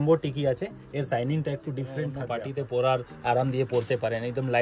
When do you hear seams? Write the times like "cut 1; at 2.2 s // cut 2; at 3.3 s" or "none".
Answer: cut 1; at 2.2 s